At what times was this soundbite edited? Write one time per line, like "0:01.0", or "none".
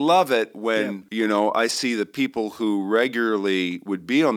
0:01.0